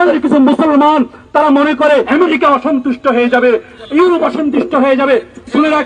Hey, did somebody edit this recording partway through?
yes; 1 cut; at 2.1 s

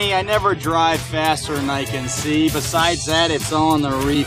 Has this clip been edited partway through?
no; 0 cuts

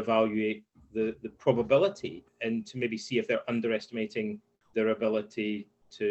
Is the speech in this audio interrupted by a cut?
yes; 1 cut; at 2.3 s

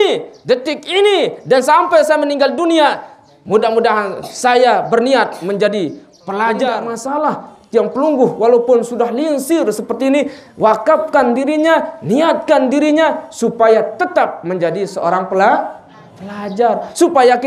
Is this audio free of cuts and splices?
no; 1 cut; at 6.9 s

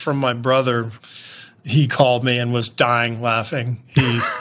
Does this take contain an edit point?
yes; 1 cut; at 1.0 s

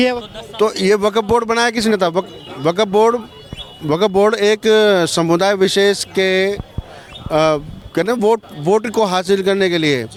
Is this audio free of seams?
yes; 0 cuts

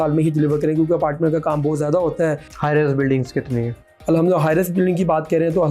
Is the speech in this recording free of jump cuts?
no; 1 cut; at 2.5 s

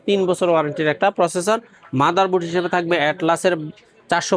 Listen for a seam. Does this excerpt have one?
no; 0 cuts

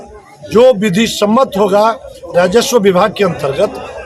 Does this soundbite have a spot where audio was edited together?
no; 0 cuts

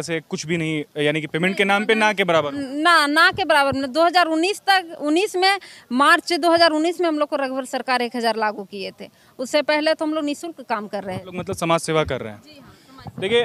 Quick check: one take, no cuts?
yes; 0 cuts

